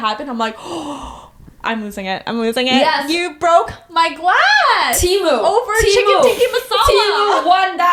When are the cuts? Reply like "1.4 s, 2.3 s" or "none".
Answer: none

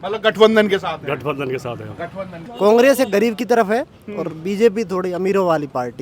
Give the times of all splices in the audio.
2.4 s

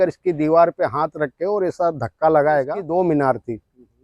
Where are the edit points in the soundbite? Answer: 2.8 s

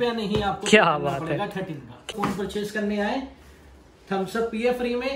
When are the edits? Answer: 2.1 s

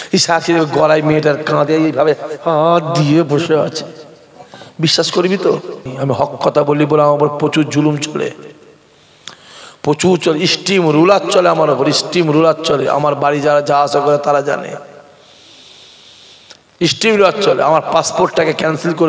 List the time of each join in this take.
5.9 s

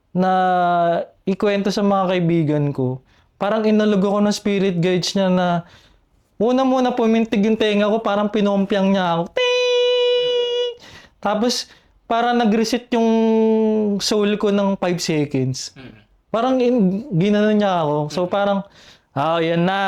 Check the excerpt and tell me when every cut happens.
none

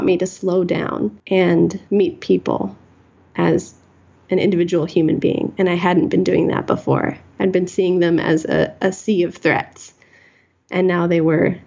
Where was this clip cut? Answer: 1.2 s, 1.8 s

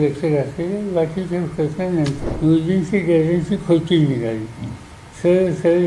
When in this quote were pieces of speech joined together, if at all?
2.2 s

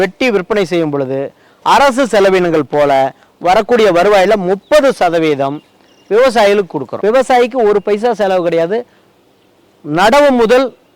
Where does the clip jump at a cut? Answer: 6.9 s

